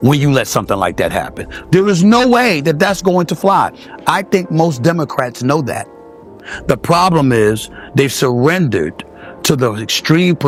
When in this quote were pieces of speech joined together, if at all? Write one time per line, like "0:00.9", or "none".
none